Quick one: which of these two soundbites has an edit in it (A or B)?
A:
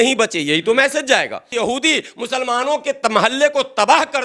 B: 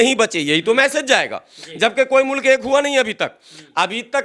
A